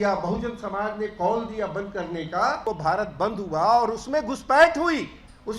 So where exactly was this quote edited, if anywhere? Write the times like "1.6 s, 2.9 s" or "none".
2.6 s